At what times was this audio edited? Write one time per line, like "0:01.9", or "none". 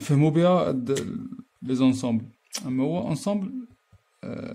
none